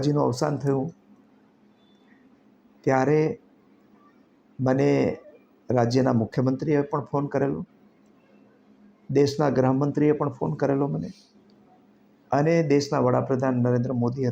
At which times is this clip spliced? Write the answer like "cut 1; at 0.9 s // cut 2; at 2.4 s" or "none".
none